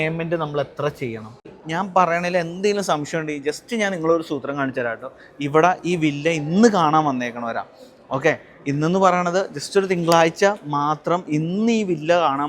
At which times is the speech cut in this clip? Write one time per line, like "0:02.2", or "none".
0:01.5